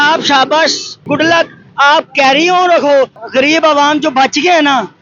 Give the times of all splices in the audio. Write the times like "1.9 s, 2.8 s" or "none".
1.0 s, 3.2 s